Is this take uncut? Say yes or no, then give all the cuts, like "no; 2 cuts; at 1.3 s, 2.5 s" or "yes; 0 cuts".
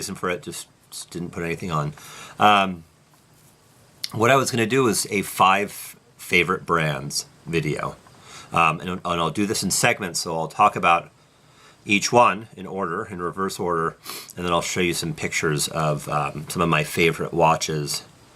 no; 1 cut; at 7.0 s